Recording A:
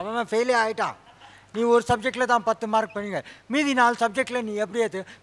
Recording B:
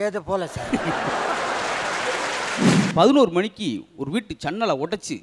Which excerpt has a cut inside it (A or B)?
B